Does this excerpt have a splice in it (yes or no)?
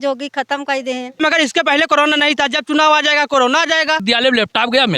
yes